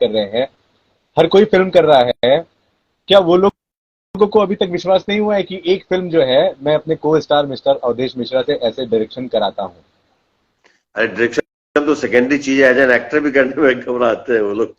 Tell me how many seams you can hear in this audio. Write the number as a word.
zero